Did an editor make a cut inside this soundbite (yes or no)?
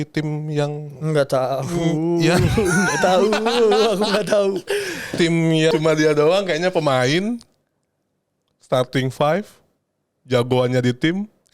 yes